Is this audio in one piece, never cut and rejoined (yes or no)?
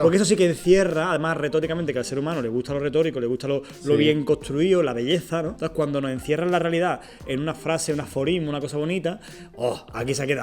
no